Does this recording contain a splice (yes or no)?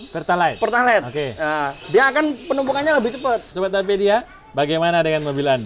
yes